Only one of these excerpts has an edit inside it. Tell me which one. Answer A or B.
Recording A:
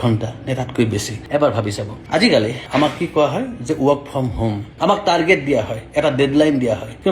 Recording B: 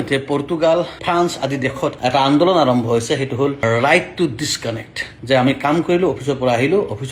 A